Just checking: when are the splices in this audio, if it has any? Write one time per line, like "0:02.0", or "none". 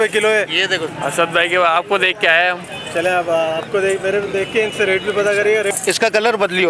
0:00.9
0:05.7